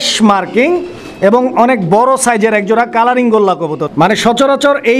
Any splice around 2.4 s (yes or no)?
no